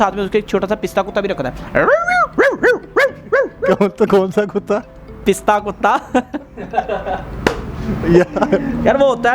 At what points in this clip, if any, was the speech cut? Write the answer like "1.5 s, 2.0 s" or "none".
6.1 s